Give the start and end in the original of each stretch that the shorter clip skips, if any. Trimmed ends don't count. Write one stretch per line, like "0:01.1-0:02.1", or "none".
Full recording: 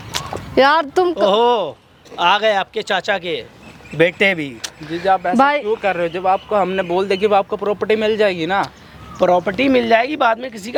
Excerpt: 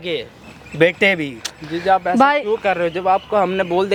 none